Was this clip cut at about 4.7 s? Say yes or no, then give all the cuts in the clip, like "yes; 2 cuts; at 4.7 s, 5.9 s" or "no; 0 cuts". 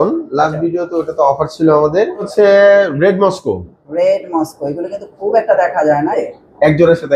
no; 2 cuts; at 2.3 s, 6.1 s